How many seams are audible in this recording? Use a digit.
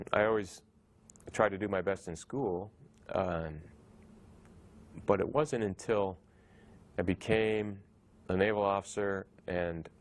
1